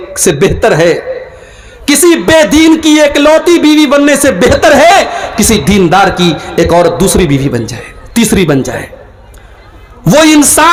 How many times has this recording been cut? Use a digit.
0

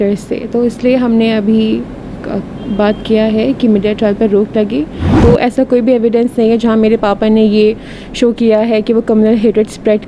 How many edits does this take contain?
1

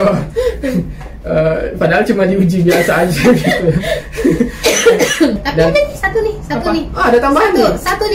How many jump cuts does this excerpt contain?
1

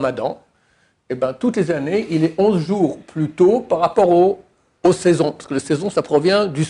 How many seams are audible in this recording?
0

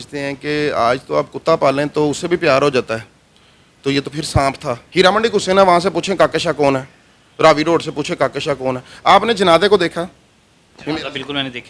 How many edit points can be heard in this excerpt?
1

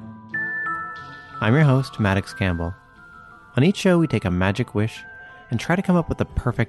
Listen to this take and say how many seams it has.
1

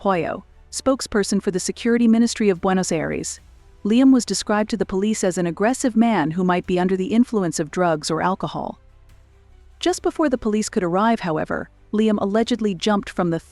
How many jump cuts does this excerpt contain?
1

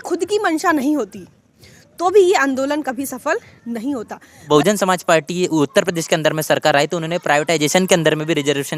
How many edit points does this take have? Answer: 1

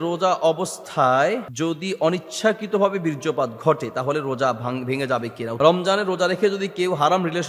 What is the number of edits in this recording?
2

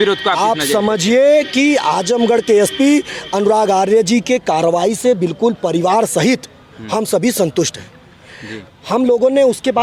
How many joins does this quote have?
0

